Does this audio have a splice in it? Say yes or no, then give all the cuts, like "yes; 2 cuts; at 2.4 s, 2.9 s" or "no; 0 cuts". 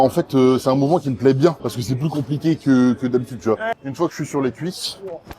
yes; 1 cut; at 3.6 s